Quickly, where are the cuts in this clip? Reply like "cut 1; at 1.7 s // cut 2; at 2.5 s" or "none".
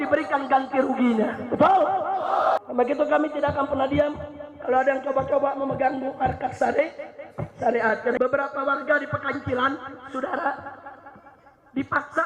cut 1; at 2.6 s // cut 2; at 8.2 s